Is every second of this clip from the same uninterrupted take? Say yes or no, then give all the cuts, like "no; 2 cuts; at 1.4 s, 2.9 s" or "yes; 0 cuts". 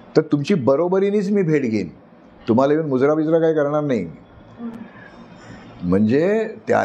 yes; 0 cuts